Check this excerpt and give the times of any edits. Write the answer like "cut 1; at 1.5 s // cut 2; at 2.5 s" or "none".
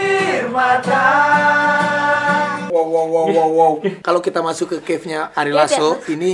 cut 1; at 2.7 s // cut 2; at 4.0 s

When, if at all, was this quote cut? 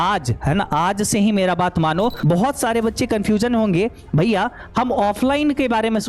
cut 1; at 2.2 s

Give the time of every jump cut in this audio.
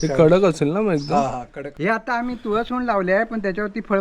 cut 1; at 1.8 s

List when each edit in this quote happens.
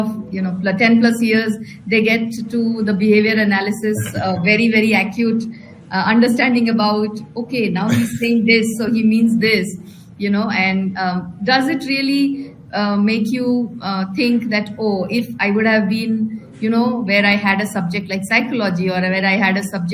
none

